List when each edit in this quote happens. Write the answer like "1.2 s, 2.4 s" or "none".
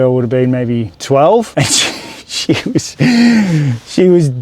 0.9 s, 1.5 s